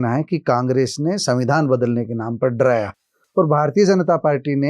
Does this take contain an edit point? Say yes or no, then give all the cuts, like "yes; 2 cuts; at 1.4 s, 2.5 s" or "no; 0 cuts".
no; 0 cuts